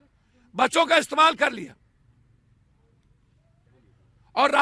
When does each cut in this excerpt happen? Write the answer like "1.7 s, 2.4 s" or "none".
none